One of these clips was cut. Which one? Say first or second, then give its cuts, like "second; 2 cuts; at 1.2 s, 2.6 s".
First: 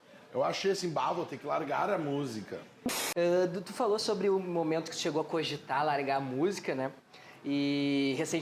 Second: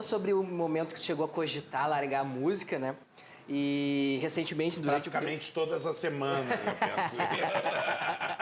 first; 1 cut; at 3.0 s